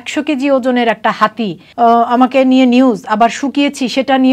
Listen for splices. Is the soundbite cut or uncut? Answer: cut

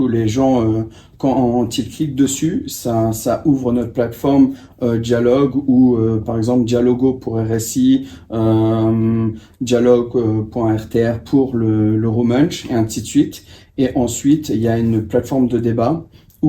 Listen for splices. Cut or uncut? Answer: uncut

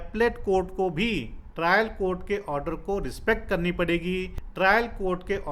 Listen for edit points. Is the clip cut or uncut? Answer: cut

